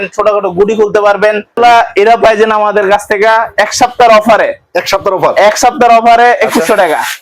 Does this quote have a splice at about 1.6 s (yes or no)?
yes